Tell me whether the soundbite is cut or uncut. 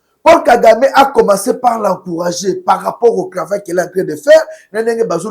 uncut